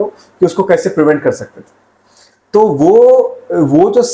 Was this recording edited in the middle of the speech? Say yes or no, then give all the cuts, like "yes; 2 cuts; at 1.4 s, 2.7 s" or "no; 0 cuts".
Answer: no; 0 cuts